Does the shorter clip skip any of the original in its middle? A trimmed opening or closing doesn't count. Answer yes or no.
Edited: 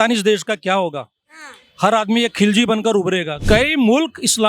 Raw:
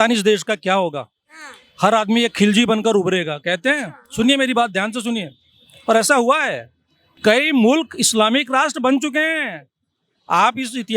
yes